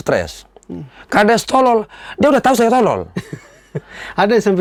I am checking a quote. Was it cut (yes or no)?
no